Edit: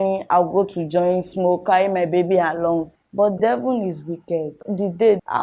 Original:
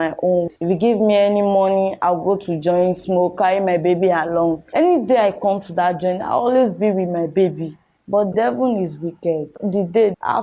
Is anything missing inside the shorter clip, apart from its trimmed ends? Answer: yes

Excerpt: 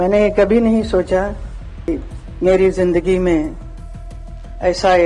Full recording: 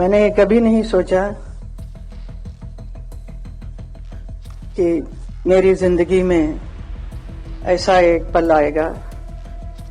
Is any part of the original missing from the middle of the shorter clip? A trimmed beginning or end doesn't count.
yes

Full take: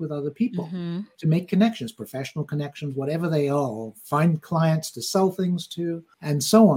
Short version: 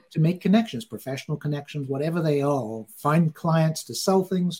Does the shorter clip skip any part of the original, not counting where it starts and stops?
no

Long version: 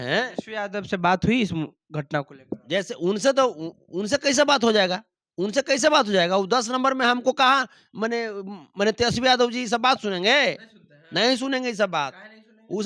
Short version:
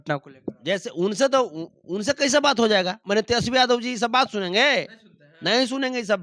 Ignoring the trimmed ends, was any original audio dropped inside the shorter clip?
yes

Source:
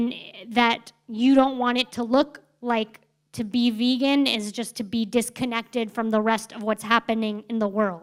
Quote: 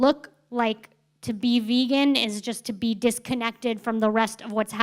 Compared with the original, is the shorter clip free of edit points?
yes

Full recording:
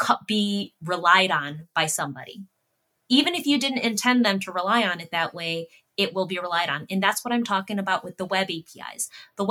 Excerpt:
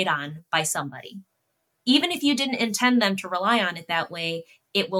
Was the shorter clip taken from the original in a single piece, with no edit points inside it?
yes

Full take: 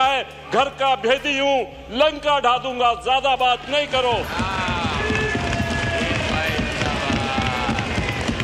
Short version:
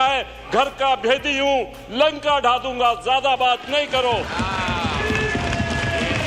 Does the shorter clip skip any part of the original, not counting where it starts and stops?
no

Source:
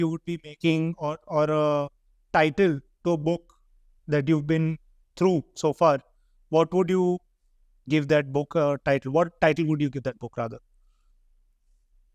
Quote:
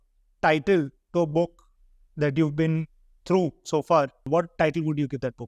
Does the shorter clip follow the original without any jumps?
no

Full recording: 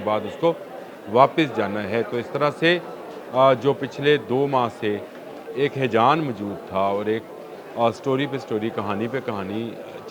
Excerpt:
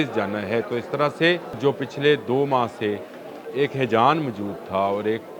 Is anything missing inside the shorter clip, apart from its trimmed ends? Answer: yes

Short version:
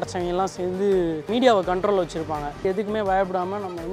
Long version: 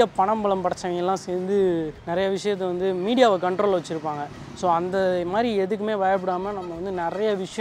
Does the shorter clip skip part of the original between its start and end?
yes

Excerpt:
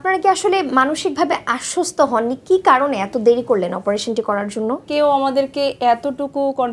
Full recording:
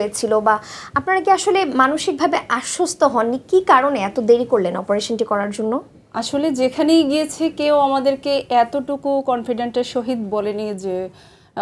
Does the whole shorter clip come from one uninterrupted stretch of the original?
no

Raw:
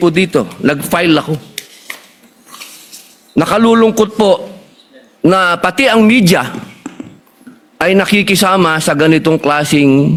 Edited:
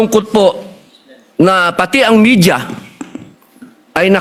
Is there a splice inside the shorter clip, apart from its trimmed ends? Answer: no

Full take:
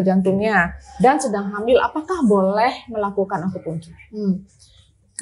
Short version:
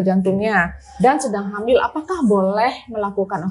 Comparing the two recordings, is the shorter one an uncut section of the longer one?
yes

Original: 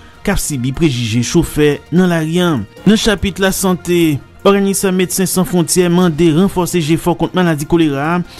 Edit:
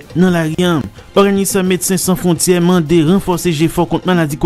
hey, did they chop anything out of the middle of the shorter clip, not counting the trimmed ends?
yes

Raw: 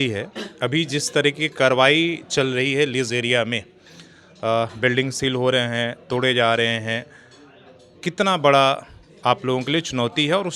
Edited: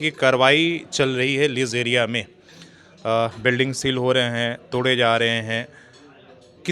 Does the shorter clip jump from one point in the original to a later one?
no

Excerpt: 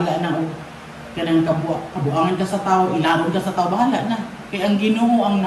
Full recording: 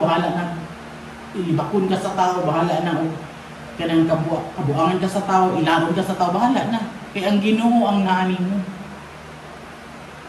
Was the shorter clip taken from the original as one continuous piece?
yes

